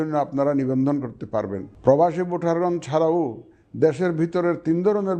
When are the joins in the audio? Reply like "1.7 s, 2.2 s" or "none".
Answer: 1.6 s